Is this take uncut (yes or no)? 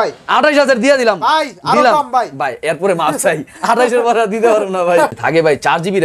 no